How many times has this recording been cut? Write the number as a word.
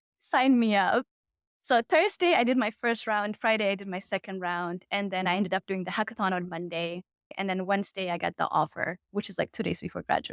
one